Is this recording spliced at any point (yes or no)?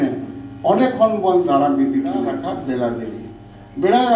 yes